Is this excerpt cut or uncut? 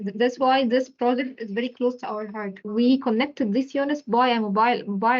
cut